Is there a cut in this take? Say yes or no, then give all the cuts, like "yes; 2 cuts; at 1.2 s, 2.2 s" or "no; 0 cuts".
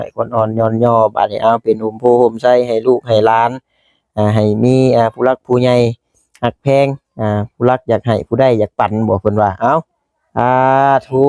no; 0 cuts